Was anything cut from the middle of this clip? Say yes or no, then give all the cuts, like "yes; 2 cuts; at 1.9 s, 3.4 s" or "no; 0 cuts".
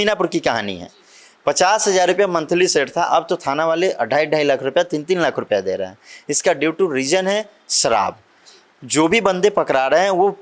no; 0 cuts